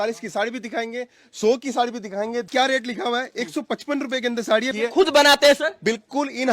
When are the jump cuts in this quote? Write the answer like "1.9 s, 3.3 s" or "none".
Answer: 2.5 s, 4.7 s